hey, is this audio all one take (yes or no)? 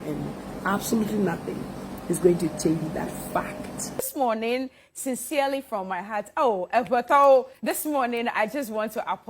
no